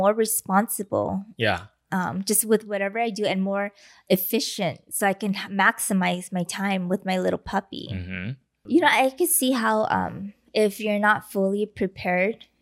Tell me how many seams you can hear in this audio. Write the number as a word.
one